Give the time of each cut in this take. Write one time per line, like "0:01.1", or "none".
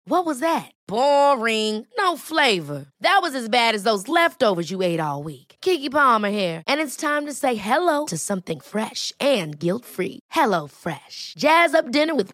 none

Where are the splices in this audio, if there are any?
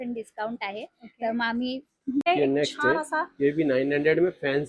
0:02.3

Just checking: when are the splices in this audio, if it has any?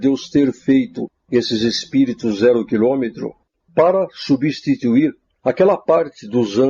0:03.4

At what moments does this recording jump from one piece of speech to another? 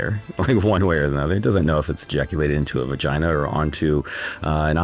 none

